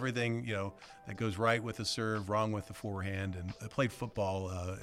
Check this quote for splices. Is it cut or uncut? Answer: cut